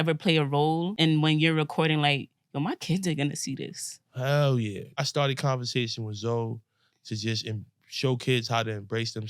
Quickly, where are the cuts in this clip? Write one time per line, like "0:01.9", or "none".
0:00.9
0:04.9